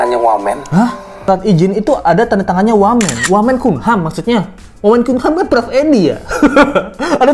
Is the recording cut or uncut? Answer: cut